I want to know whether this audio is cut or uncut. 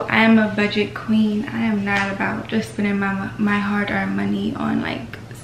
uncut